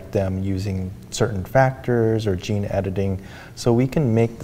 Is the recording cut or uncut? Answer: uncut